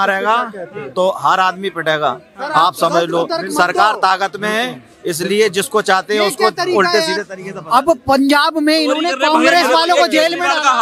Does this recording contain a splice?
no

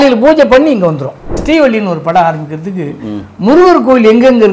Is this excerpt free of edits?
no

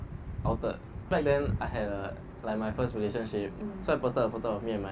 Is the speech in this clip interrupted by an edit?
no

